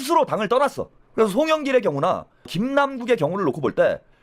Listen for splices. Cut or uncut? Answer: cut